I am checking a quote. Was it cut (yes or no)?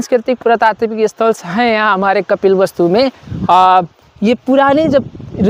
no